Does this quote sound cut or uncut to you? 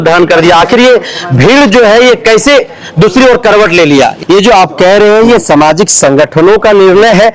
cut